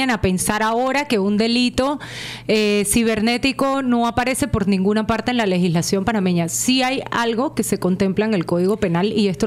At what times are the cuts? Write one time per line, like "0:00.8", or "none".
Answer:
none